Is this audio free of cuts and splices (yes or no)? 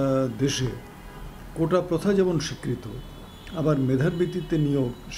yes